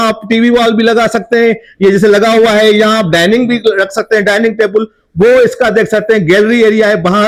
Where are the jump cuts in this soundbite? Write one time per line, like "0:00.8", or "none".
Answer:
none